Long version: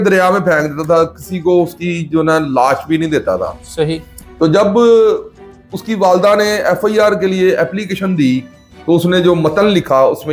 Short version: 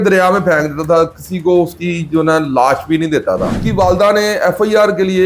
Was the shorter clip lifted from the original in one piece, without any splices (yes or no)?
no